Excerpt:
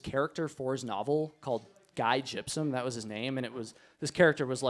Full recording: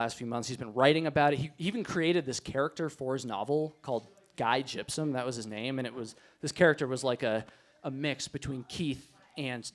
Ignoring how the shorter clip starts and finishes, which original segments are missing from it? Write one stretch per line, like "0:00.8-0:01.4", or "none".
none